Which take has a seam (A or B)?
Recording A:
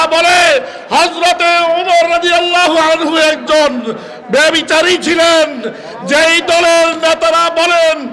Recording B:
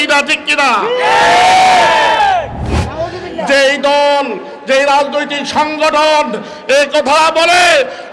B